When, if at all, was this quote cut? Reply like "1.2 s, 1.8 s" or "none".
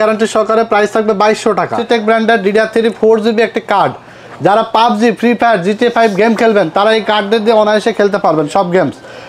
1.8 s